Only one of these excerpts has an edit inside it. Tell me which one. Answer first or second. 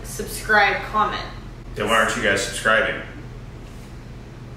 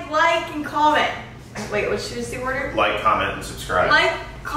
second